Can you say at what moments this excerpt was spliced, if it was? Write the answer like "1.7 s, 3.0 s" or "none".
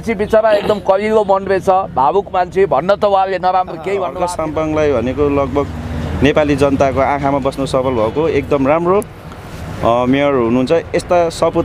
4.2 s